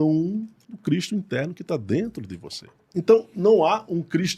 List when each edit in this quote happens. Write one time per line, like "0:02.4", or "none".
none